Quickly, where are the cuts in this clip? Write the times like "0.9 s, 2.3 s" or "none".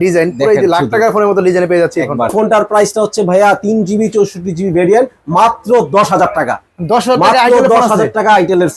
2.3 s